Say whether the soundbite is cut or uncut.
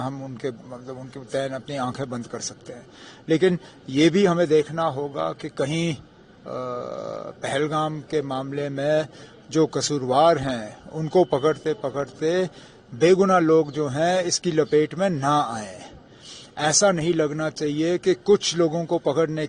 cut